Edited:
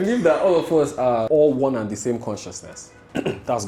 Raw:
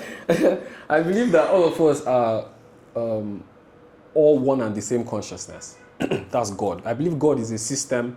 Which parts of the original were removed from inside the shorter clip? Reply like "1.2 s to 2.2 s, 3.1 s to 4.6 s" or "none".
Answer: 2.3 s to 4.1 s